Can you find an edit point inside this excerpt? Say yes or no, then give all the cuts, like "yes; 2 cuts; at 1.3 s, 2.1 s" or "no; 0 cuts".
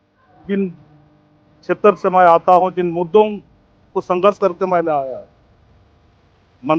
no; 0 cuts